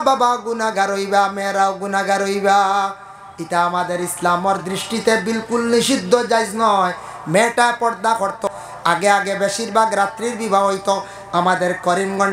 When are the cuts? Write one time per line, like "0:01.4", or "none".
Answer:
0:08.5